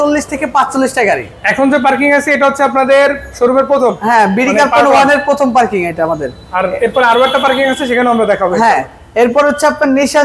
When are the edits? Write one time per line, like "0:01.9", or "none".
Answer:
none